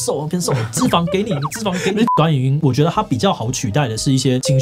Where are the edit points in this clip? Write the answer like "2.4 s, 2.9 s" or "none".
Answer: 2.1 s